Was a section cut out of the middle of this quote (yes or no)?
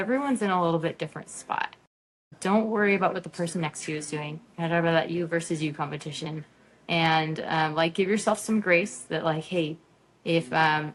no